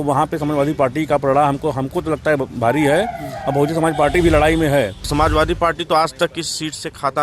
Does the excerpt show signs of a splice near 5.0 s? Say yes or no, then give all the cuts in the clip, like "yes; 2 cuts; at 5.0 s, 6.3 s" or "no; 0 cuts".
yes; 1 cut; at 5.0 s